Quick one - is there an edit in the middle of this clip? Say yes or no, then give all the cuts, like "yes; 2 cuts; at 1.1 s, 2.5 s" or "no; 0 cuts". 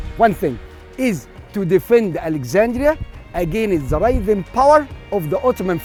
no; 0 cuts